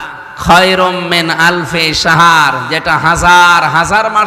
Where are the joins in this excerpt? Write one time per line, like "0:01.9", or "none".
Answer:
none

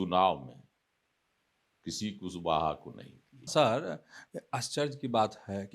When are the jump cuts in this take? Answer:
0:03.4

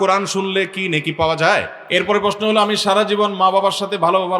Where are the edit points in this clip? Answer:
0:01.8

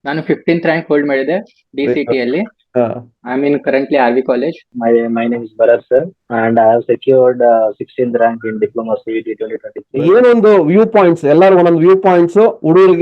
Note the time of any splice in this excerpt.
0:03.1
0:04.7
0:06.2
0:09.8

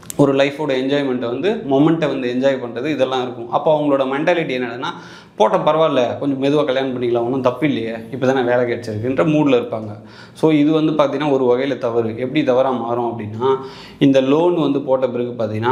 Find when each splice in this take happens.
none

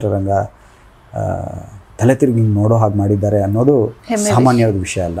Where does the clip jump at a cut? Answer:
0:04.0

